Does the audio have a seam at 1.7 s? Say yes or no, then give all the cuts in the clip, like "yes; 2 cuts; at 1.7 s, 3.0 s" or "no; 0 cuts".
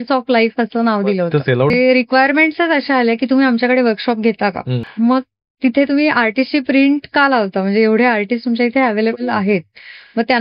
yes; 2 cuts; at 1.7 s, 4.8 s